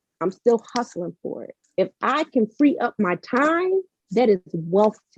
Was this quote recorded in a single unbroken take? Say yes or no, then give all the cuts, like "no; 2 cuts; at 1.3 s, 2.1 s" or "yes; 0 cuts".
yes; 0 cuts